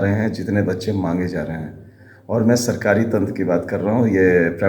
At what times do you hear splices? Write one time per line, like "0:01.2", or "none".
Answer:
none